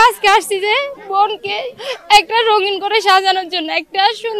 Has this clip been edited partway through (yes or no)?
yes